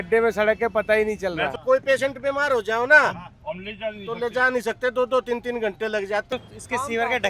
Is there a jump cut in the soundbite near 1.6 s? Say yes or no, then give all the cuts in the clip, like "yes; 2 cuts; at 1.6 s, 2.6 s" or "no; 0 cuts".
yes; 2 cuts; at 1.6 s, 6.3 s